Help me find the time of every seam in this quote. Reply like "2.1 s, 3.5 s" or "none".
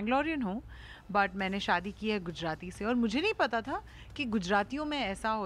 none

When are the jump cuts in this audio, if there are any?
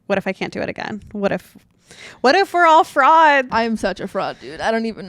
3.5 s

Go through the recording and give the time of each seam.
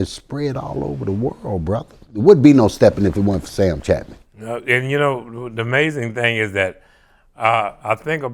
2.0 s

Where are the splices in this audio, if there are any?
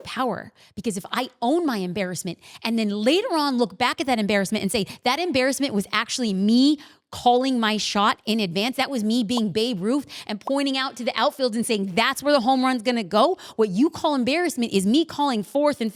none

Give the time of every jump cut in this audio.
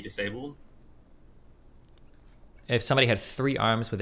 none

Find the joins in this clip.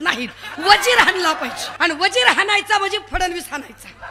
1.7 s

